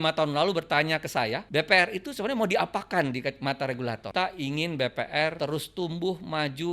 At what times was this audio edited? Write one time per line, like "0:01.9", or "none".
0:01.4
0:04.1
0:05.4